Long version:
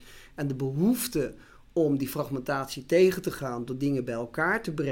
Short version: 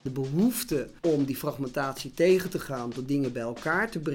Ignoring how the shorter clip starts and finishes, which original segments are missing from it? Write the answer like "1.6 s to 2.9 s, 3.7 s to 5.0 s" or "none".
1.4 s to 1.6 s